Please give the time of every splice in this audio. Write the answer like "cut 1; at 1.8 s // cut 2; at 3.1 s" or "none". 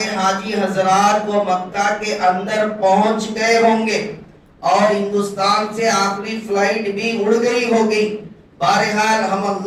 none